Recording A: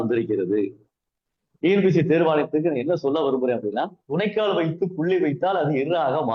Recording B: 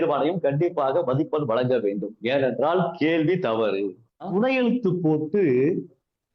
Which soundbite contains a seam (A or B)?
B